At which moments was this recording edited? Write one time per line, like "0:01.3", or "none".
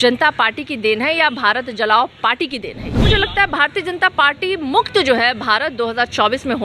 0:02.9